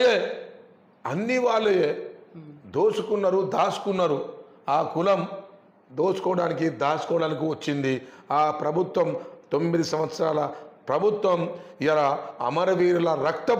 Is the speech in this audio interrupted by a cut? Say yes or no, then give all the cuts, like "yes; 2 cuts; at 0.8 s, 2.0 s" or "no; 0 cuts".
no; 0 cuts